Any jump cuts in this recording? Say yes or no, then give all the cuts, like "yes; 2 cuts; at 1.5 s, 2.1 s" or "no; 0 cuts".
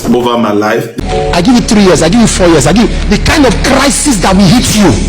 yes; 1 cut; at 0.9 s